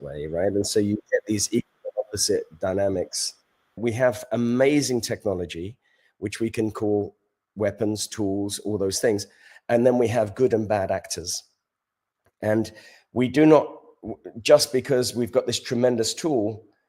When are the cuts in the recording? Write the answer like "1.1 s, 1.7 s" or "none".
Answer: 3.8 s